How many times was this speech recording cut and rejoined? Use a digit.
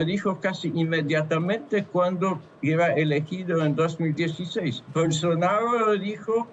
1